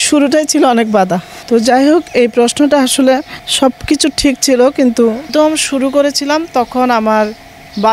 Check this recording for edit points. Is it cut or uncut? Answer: cut